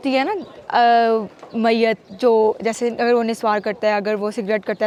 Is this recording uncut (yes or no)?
yes